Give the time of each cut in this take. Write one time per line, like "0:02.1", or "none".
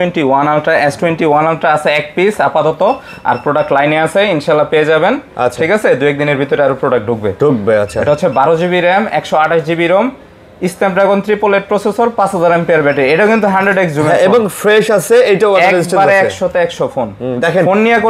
none